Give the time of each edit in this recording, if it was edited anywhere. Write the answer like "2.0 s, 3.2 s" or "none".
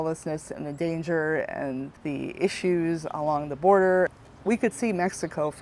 4.1 s